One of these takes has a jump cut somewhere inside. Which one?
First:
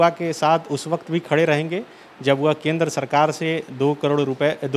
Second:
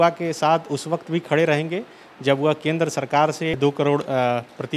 second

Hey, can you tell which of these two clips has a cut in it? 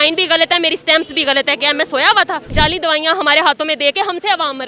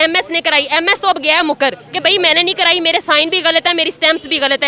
first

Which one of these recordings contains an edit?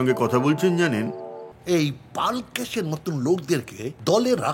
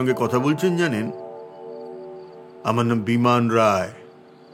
first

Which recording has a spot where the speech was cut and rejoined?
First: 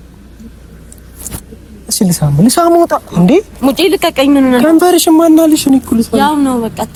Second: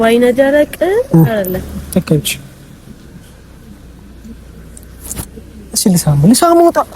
second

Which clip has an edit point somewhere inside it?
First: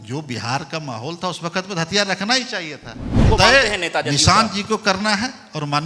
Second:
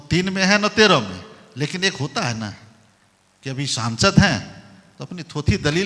first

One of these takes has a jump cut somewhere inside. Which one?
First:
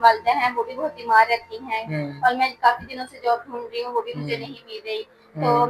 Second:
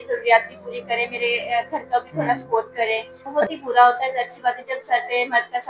second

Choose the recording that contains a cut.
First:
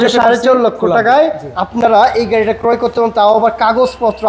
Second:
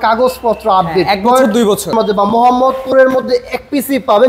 second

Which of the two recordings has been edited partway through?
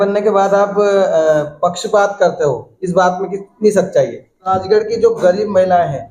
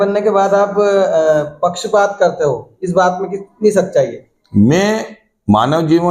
first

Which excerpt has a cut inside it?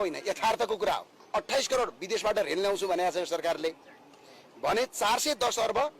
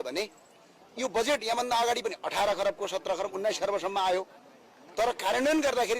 first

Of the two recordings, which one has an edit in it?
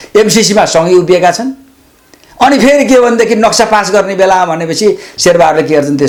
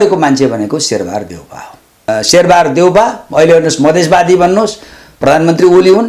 second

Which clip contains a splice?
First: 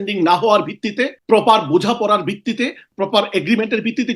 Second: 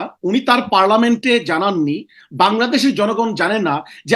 first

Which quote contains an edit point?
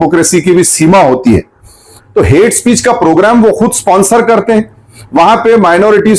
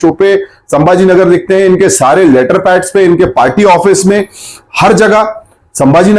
first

